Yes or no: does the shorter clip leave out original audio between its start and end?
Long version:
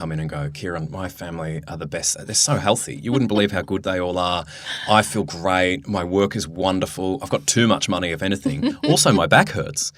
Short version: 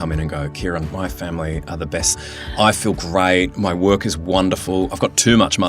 yes